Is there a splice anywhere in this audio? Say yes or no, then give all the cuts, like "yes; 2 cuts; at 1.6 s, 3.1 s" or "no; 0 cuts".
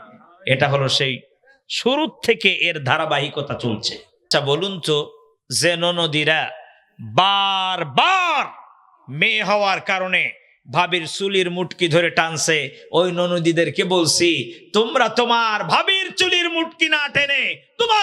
yes; 1 cut; at 4.3 s